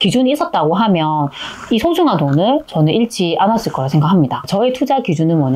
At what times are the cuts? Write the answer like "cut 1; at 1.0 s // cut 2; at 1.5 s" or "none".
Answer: cut 1; at 4.5 s